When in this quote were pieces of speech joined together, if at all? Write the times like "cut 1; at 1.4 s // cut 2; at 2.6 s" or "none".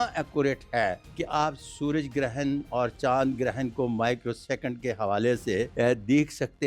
cut 1; at 1.1 s // cut 2; at 5.7 s